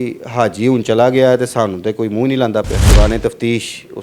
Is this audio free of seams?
no; 1 cut; at 2.9 s

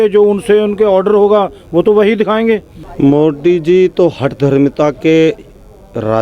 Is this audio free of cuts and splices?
no; 1 cut; at 2.8 s

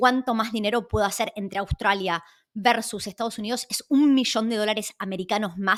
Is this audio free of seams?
yes; 0 cuts

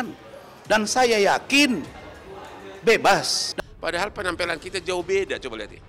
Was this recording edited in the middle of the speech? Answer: yes; 1 cut; at 3.4 s

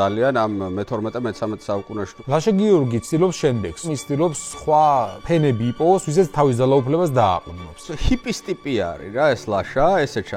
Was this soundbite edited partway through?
yes; 4 cuts; at 2.1 s, 3.9 s, 5.2 s, 7.9 s

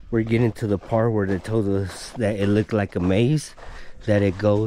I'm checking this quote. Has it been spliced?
no; 0 cuts

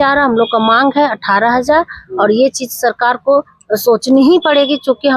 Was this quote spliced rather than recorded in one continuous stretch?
no; 0 cuts

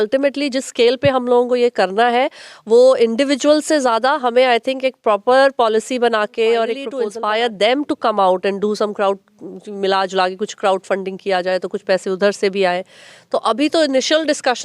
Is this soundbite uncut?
no; 1 cut; at 7.0 s

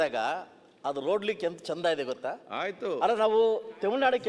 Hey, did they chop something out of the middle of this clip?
no; 0 cuts

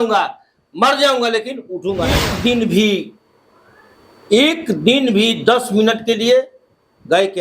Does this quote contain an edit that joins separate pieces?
yes; 1 cut; at 2.3 s

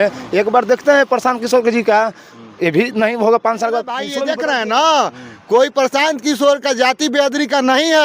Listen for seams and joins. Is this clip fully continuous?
no; 1 cut; at 4.1 s

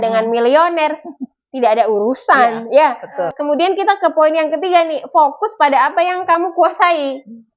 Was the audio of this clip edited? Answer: yes; 1 cut; at 3.3 s

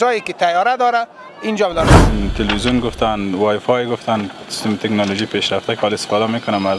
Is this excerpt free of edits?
no; 1 cut; at 2.0 s

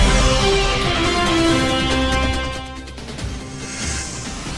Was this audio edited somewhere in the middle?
yes; 1 cut; at 3.7 s

